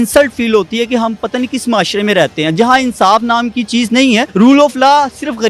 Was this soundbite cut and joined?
yes; 1 cut; at 4.3 s

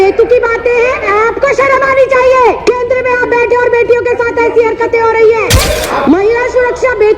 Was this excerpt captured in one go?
no; 3 cuts; at 1.1 s, 2.6 s, 5.7 s

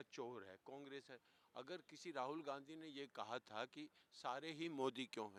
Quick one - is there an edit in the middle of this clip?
no; 0 cuts

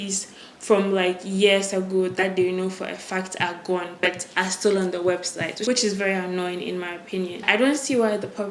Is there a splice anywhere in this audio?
no; 0 cuts

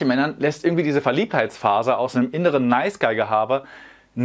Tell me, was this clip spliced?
no; 0 cuts

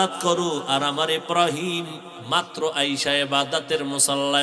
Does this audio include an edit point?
no; 0 cuts

